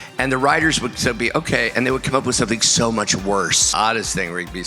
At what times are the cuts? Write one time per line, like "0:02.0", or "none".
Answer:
0:03.7